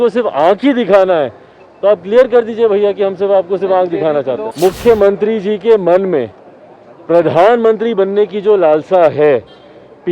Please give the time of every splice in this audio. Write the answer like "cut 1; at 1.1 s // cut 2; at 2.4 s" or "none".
cut 1; at 4.4 s